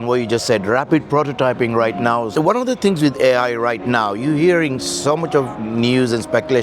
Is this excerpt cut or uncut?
cut